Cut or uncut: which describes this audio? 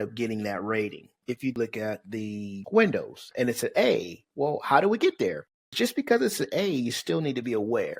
cut